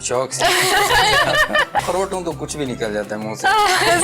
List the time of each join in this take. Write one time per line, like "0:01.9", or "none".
0:01.8